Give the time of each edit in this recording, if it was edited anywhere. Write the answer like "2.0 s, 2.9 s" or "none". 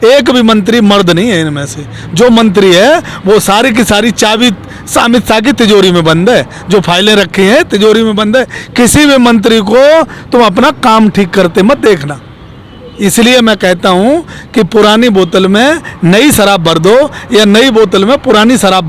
none